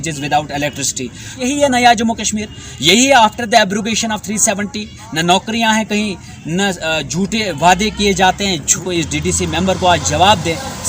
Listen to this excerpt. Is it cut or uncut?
cut